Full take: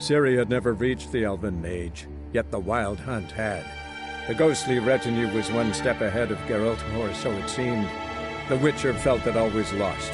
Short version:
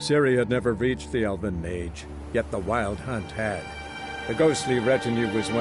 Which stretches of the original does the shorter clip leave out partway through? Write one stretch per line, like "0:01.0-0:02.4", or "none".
none